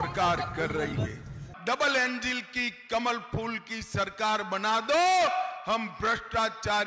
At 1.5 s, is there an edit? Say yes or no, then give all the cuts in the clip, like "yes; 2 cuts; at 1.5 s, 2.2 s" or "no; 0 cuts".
yes; 1 cut; at 1.5 s